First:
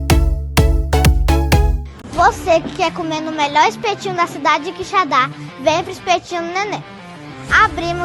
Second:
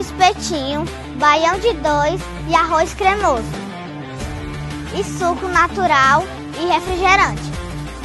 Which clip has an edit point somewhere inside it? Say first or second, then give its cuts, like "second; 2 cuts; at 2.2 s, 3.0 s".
first; 1 cut; at 1.8 s